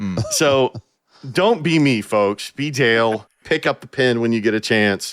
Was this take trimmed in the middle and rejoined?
yes; 1 cut; at 3.4 s

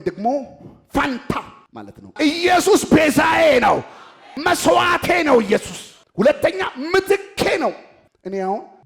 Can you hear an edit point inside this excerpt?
yes; 1 cut; at 2.2 s

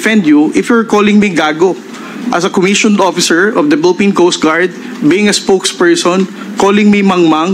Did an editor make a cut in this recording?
no; 0 cuts

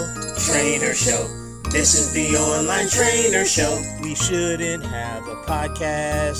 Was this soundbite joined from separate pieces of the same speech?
no; 0 cuts

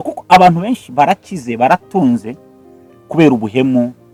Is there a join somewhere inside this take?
no; 0 cuts

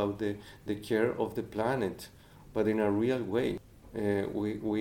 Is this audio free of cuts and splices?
no; 1 cut; at 3.6 s

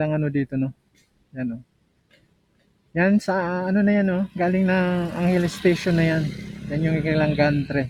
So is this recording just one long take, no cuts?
yes; 0 cuts

